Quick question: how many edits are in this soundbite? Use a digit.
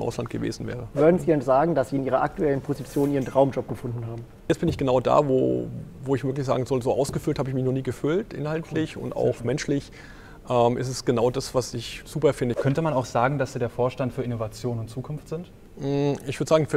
4